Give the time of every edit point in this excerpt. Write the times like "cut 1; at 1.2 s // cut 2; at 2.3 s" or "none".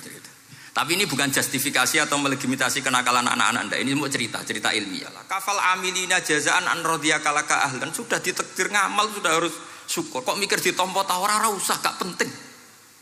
cut 1; at 5.2 s